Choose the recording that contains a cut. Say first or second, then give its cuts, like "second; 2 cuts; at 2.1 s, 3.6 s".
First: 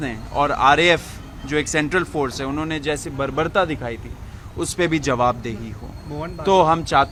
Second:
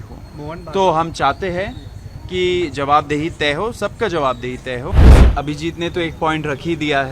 second; 1 cut; at 5.0 s